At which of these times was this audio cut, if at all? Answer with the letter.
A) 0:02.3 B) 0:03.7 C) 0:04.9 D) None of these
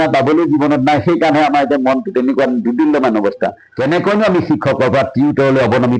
B